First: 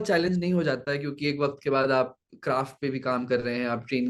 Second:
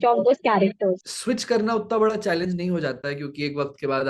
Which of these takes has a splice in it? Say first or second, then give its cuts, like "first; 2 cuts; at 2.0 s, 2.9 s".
second; 1 cut; at 1.1 s